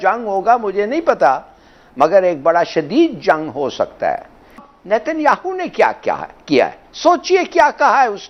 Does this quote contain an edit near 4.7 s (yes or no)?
yes